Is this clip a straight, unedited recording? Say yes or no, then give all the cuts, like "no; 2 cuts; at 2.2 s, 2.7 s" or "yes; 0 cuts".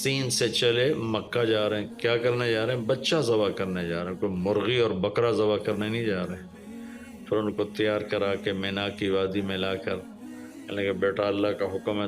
yes; 0 cuts